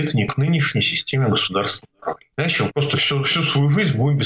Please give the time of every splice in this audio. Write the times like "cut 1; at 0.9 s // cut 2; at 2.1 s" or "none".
cut 1; at 2.2 s